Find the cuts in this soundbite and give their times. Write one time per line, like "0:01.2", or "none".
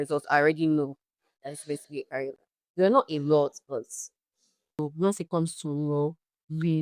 0:04.8